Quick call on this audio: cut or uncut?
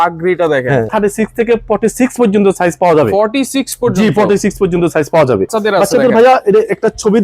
cut